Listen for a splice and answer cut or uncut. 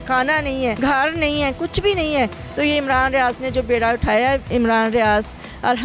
cut